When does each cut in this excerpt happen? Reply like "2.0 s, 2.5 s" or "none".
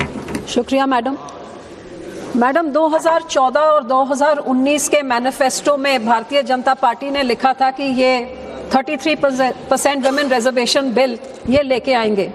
none